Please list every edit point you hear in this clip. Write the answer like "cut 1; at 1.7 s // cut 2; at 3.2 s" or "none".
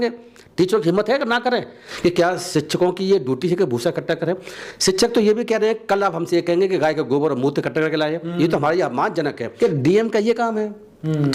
cut 1; at 1.8 s // cut 2; at 9.4 s